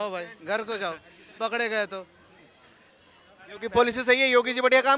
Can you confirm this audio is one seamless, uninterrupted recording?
yes; 0 cuts

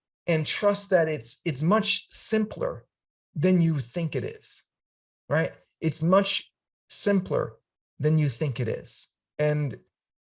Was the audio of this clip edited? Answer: no; 0 cuts

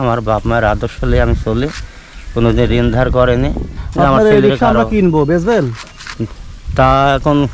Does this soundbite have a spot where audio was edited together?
no; 0 cuts

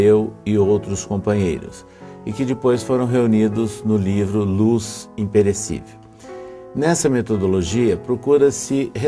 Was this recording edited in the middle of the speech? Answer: yes; 1 cut; at 3.2 s

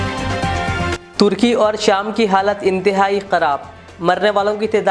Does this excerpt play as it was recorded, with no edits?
yes; 0 cuts

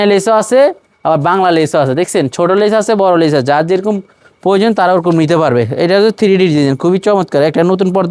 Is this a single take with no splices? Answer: yes; 0 cuts

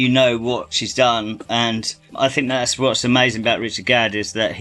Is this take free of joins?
yes; 0 cuts

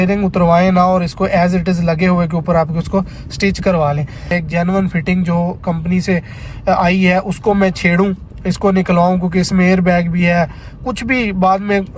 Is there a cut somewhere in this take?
yes; 1 cut; at 4.4 s

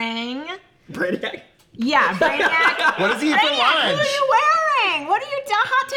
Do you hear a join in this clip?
no; 0 cuts

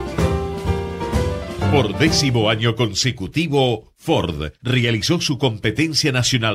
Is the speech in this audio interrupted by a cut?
yes; 1 cut; at 1.7 s

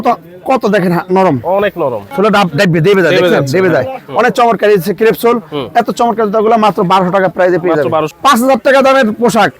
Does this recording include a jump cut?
yes; 2 cuts; at 2.0 s, 8.1 s

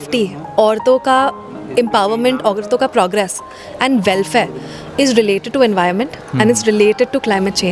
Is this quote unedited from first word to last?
yes; 0 cuts

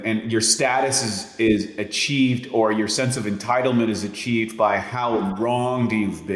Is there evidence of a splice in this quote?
no; 0 cuts

